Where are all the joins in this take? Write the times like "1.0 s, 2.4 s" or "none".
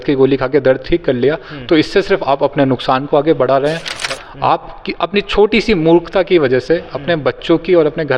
4.0 s